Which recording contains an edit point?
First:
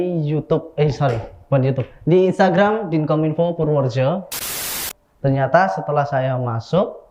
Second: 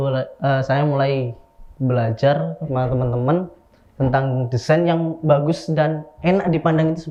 first; 1 cut; at 4.6 s

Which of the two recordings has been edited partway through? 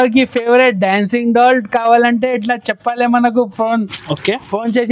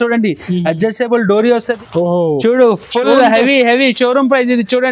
second; 1 cut; at 1.8 s

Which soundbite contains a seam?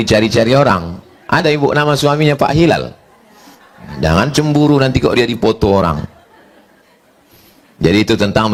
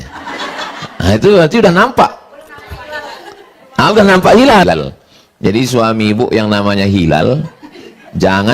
second; 1 cut; at 4.6 s

